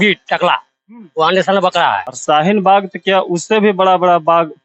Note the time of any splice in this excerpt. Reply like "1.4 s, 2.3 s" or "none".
2.1 s